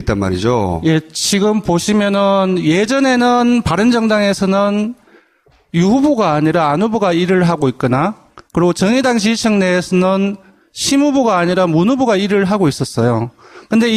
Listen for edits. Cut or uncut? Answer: uncut